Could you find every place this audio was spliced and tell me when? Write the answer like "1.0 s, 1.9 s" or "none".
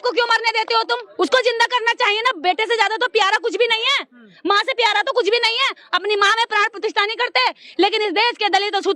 1.1 s